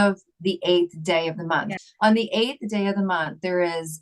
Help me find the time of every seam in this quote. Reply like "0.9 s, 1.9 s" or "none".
1.7 s

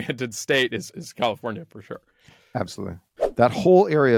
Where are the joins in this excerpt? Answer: 3.1 s

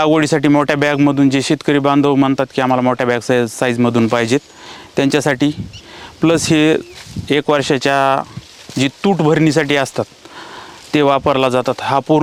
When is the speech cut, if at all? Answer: none

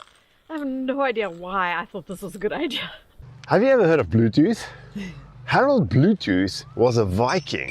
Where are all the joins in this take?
3.3 s

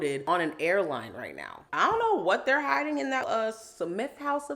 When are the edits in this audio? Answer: 1.7 s, 3.2 s

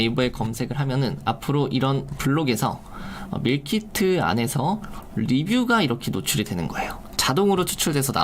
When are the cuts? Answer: none

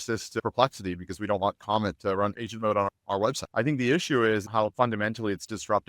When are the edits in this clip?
3.1 s, 4.5 s

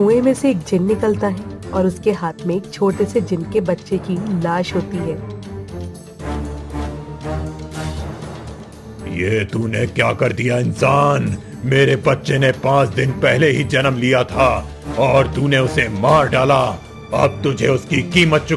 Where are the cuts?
none

